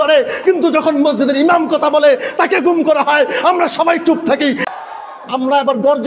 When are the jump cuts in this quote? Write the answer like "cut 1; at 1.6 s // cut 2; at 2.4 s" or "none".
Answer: cut 1; at 4.8 s